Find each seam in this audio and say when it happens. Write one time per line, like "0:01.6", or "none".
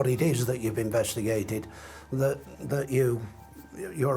none

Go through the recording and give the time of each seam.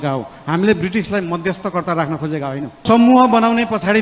0:02.8

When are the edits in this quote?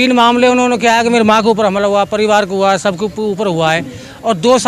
none

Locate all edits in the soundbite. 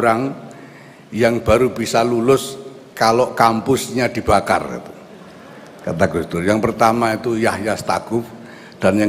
none

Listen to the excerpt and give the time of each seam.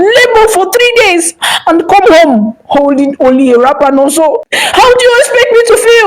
0:04.5

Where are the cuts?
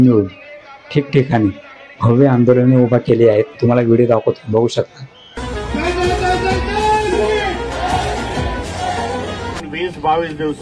0:05.4
0:09.6

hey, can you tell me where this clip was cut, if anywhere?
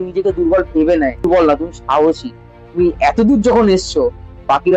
0:01.2

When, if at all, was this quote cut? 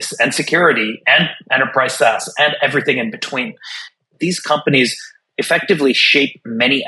0:04.1

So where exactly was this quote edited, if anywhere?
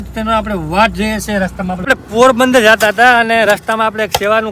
0:01.9

